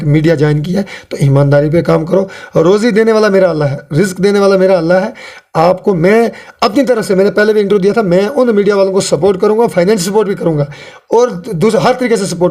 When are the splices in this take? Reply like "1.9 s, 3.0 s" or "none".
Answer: none

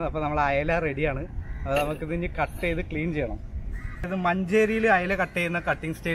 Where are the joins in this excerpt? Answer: 4.1 s

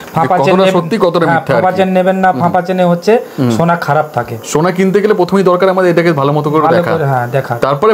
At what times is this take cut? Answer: none

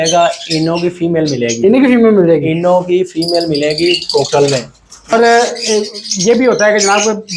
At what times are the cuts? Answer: 5.1 s

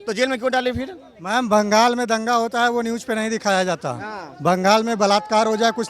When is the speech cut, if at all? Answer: none

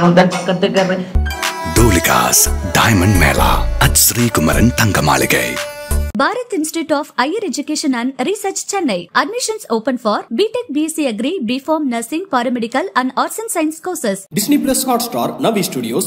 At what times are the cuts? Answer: 1.0 s

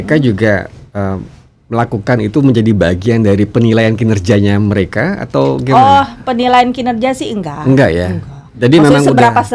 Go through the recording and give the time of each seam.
none

